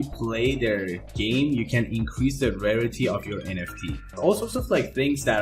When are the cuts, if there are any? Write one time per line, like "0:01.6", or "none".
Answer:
0:04.1